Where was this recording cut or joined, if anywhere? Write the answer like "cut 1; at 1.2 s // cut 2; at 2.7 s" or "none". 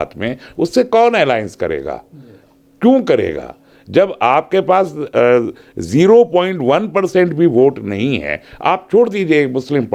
none